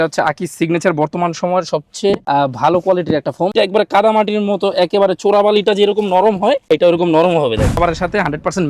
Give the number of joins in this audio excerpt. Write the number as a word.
one